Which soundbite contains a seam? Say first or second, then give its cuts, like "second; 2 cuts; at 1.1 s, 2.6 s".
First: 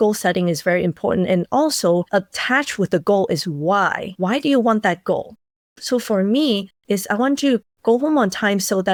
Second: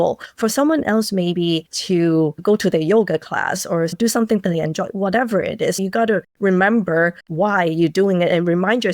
second; 3 cuts; at 2.4 s, 4.0 s, 5.8 s